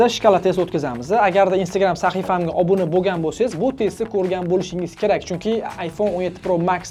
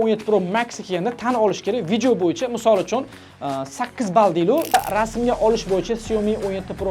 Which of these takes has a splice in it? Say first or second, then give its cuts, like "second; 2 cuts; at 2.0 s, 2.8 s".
second; 1 cut; at 4.7 s